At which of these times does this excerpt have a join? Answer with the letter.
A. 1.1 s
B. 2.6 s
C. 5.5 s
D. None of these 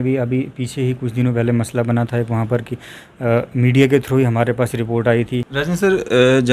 C